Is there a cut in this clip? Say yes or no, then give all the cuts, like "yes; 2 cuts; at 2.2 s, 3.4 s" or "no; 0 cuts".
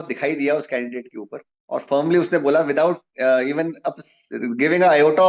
no; 0 cuts